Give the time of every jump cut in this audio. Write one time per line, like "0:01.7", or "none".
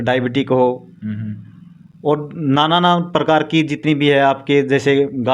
none